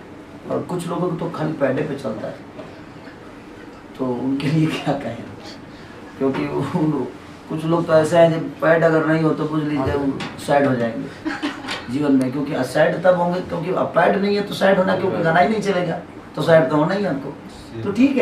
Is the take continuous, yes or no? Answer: yes